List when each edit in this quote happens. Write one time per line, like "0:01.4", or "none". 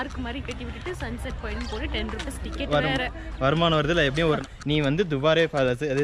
0:04.4